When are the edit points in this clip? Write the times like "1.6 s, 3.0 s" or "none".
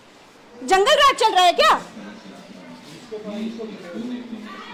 none